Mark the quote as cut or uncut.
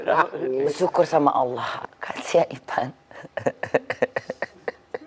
cut